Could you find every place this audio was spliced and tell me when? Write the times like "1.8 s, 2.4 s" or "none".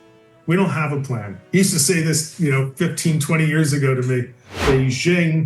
4.5 s